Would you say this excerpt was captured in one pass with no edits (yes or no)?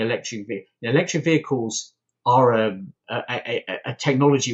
yes